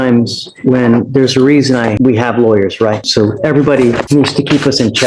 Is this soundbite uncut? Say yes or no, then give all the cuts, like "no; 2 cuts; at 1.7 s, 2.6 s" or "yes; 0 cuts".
no; 3 cuts; at 2.0 s, 3.0 s, 4.0 s